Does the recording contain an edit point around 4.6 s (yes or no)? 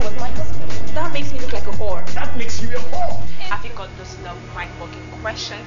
yes